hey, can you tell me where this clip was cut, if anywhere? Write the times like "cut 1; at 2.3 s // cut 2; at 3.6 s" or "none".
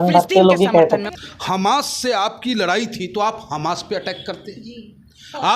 cut 1; at 1.0 s